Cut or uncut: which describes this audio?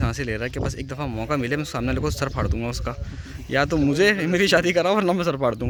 uncut